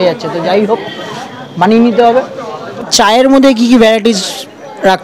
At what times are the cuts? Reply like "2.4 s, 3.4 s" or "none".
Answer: 2.9 s